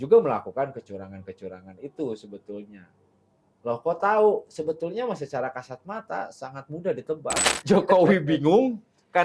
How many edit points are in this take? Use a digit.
1